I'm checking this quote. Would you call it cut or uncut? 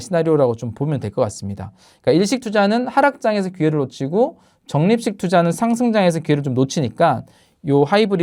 uncut